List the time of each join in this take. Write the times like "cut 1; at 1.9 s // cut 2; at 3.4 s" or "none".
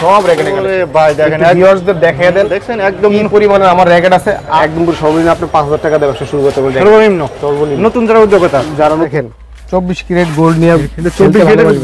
cut 1; at 4.6 s // cut 2; at 9.1 s